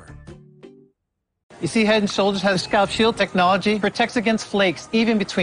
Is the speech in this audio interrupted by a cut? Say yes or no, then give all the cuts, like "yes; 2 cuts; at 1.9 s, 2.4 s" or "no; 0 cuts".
yes; 1 cut; at 1.2 s